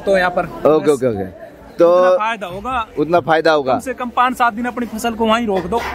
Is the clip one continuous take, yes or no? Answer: yes